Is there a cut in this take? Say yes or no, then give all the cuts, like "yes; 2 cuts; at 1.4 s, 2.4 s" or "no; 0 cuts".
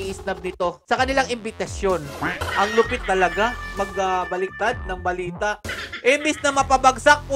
yes; 2 cuts; at 2.4 s, 5.6 s